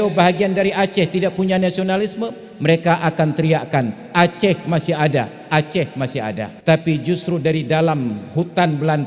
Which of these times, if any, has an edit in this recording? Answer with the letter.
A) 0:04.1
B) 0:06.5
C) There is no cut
B